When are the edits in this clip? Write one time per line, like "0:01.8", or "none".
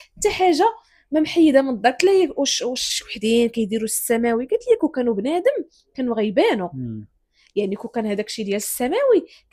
none